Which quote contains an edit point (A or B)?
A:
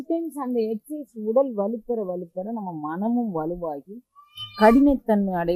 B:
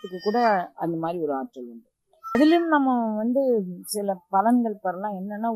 B